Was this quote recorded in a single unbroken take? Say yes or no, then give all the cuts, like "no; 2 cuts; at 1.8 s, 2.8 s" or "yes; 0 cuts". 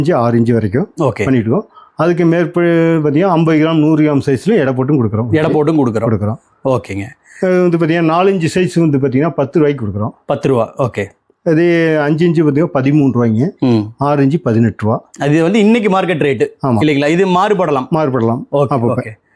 yes; 0 cuts